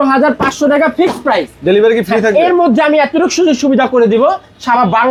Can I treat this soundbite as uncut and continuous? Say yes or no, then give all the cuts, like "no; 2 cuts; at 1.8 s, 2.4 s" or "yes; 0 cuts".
yes; 0 cuts